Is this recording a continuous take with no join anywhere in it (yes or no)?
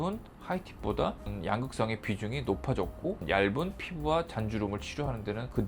no